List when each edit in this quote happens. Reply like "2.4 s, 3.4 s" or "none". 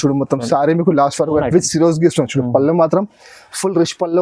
1.4 s